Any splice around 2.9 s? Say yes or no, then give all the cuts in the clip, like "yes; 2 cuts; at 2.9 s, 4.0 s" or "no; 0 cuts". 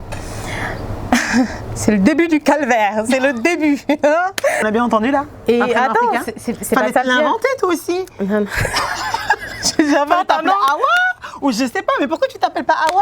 no; 1 cut; at 4.6 s